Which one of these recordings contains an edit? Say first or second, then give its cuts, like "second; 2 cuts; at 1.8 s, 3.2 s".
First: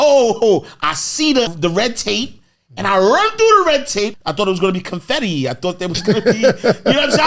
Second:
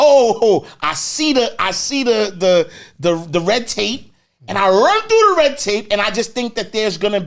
first; 2 cuts; at 1.5 s, 4.1 s